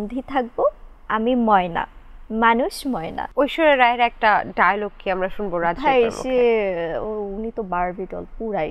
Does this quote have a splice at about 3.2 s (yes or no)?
yes